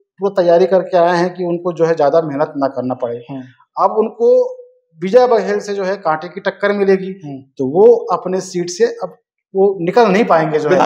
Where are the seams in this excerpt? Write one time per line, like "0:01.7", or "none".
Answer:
none